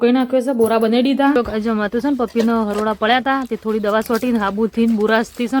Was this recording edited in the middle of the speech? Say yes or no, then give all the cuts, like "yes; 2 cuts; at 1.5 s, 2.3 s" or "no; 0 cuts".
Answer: yes; 1 cut; at 1.4 s